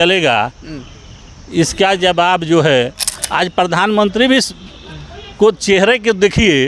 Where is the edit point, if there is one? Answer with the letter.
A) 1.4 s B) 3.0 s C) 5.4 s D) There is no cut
B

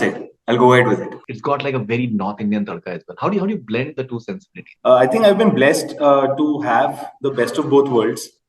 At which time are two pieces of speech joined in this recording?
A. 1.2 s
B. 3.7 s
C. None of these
A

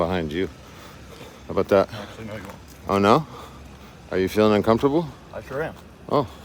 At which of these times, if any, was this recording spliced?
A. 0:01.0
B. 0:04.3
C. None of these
C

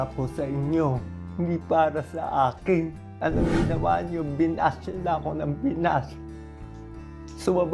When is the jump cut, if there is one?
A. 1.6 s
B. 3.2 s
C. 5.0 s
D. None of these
B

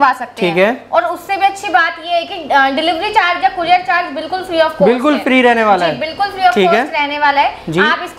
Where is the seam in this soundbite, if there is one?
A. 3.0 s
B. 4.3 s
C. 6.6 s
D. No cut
D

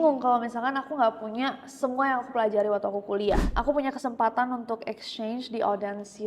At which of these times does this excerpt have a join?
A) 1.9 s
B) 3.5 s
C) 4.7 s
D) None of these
B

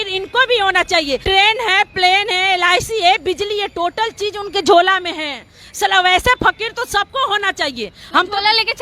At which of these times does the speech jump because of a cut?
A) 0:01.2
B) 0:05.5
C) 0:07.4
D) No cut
A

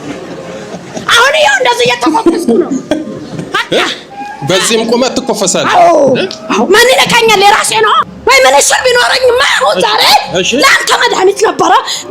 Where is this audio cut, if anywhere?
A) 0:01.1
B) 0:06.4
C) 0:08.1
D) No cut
C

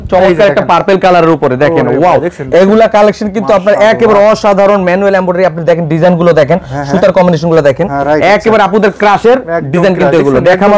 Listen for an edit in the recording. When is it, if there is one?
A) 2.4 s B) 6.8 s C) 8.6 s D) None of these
D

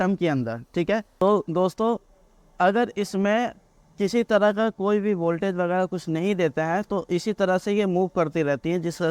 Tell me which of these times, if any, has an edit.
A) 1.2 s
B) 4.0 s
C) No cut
A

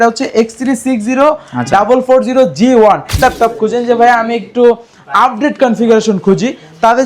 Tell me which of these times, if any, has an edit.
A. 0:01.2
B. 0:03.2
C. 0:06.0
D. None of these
B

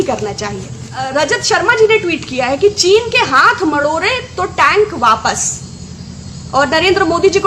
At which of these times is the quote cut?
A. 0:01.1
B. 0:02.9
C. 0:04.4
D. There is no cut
A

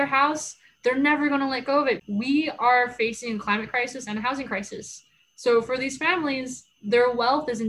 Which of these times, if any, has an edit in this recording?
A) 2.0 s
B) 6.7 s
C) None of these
A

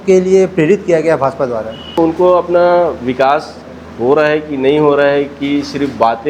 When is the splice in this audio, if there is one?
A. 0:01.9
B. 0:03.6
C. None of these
A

